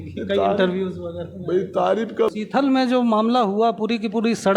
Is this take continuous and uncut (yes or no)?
no